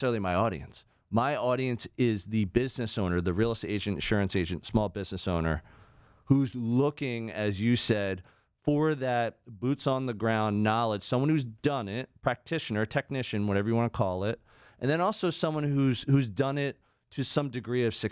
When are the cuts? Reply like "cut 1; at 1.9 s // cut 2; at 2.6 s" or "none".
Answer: none